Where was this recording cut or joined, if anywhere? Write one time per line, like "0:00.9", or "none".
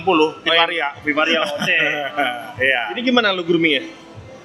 none